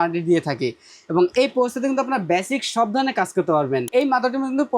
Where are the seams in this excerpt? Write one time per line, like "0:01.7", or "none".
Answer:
0:03.9